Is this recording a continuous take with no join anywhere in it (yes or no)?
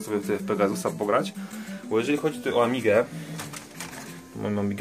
yes